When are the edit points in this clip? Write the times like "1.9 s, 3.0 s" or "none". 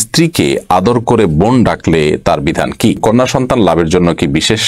3.0 s